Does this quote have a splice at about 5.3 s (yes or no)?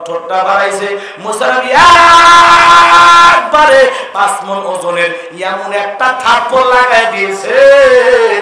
no